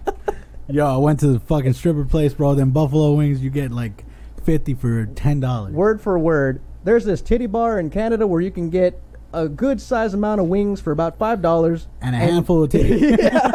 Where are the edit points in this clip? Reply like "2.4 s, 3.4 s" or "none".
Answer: none

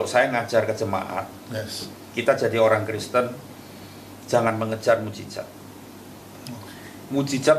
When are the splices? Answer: none

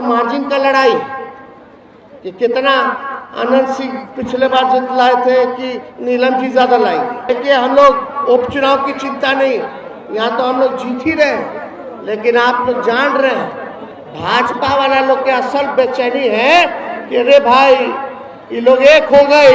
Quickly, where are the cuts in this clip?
7.3 s

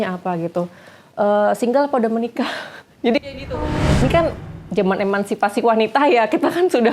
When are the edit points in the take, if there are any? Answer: 4.0 s

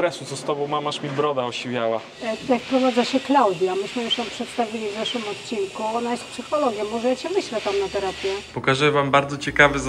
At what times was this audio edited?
2.1 s, 8.5 s

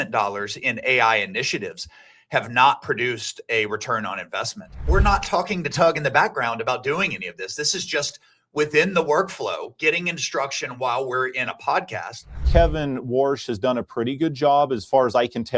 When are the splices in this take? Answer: 4.7 s, 12.4 s

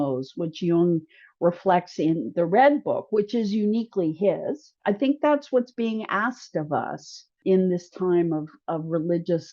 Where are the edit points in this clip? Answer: 4.7 s, 7.4 s

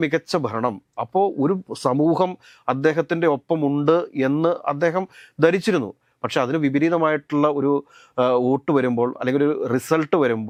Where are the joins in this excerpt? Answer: none

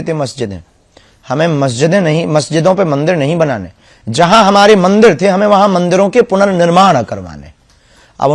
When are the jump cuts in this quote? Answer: none

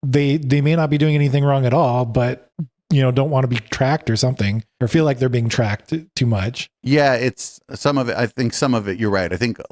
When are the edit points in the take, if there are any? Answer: none

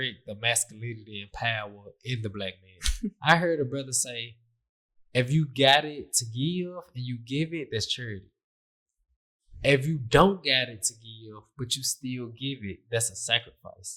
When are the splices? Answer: 3.2 s

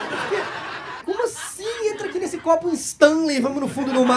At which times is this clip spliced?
1.0 s

